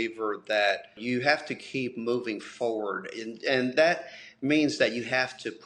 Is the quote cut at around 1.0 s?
yes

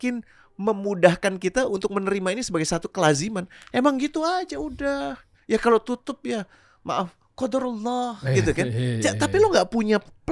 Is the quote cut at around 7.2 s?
no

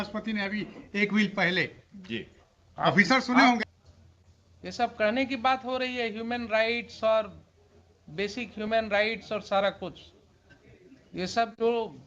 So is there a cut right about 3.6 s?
yes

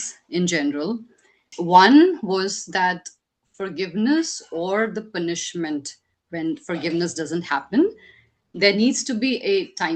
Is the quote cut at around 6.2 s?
no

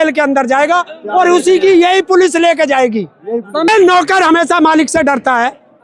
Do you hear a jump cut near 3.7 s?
yes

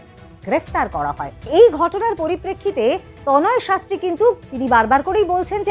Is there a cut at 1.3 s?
yes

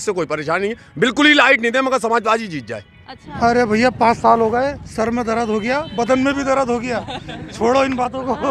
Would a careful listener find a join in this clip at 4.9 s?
no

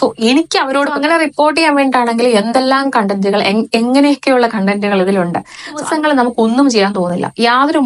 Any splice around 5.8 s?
yes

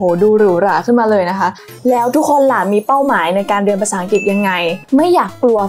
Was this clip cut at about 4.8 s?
yes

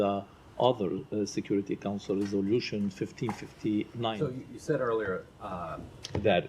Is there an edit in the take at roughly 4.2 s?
yes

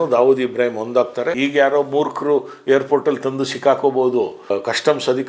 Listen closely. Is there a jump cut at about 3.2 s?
no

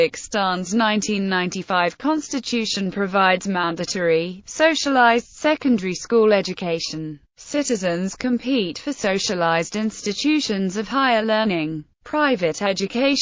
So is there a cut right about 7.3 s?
yes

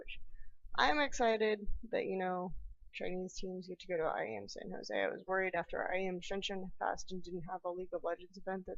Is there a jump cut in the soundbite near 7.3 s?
no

